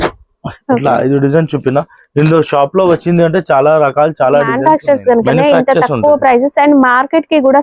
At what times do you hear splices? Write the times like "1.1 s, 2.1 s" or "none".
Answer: 4.5 s